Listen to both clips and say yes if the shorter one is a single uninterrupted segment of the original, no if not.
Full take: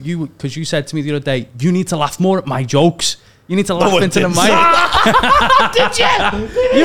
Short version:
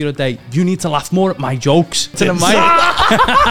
no